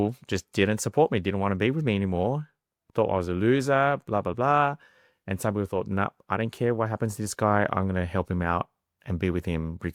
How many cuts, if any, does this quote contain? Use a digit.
0